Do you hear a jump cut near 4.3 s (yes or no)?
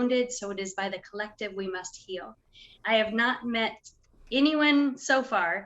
no